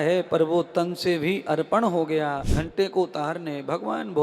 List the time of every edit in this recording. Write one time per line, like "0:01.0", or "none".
0:02.5